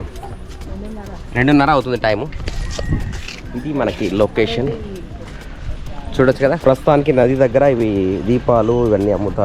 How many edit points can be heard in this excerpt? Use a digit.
1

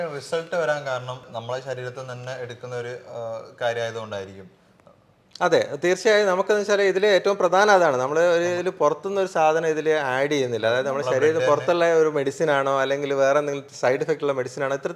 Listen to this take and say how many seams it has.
0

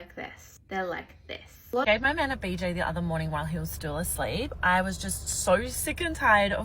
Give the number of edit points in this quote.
1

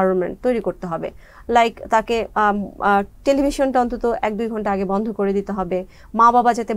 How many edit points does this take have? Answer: 0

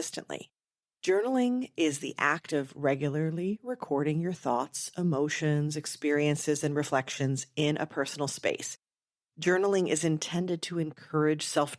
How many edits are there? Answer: 1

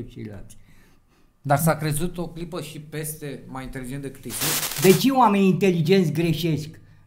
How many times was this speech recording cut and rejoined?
1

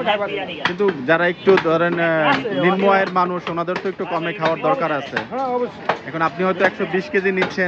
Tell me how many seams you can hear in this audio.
0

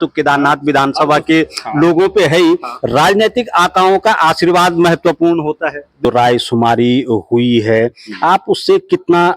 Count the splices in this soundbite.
1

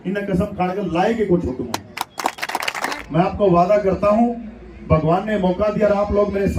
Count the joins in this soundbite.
1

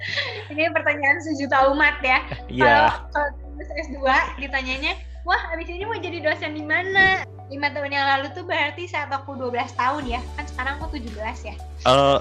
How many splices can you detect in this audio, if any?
1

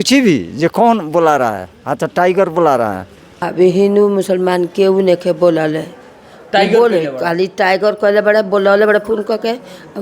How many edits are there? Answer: 1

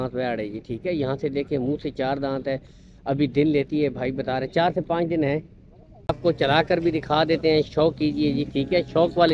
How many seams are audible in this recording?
1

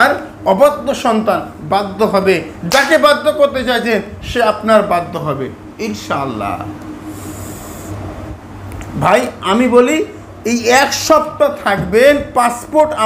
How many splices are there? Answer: 1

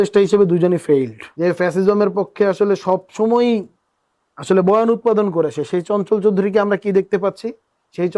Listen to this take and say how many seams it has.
1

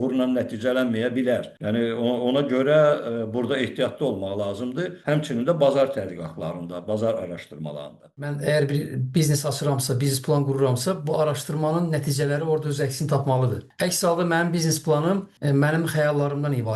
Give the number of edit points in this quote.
5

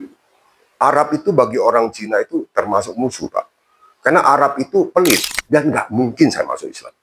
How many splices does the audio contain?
1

